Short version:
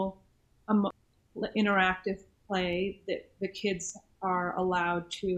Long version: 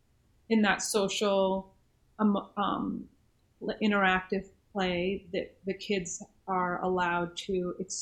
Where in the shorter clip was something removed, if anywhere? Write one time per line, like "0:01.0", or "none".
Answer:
0:01.0